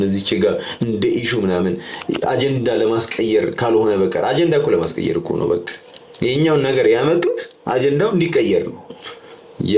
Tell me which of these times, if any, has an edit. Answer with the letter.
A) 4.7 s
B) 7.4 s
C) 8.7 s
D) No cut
D